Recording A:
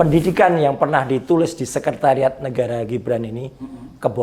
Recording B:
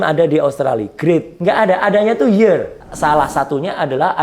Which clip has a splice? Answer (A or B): B